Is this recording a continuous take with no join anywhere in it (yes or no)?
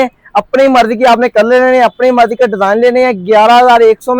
yes